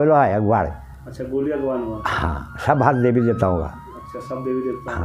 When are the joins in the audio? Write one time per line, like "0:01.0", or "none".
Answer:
none